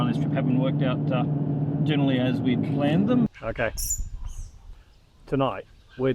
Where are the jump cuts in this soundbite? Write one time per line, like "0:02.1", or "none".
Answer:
0:03.3